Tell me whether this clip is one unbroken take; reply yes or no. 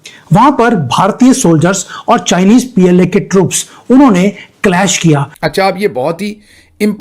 no